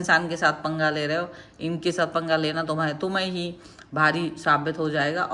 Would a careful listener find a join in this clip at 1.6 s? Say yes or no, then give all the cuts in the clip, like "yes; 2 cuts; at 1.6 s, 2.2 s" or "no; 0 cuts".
no; 0 cuts